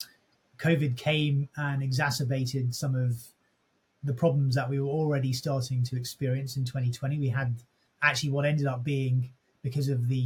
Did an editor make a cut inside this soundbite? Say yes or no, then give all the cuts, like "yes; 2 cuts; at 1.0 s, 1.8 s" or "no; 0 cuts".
no; 0 cuts